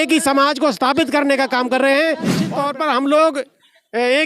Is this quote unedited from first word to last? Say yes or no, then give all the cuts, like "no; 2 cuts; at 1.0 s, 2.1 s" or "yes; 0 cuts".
no; 1 cut; at 2.4 s